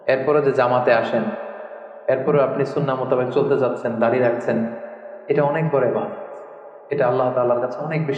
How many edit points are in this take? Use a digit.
0